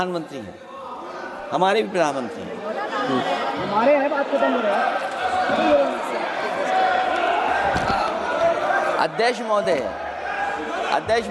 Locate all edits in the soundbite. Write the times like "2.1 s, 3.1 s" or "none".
none